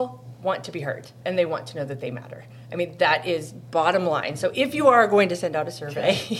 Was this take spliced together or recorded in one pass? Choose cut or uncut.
cut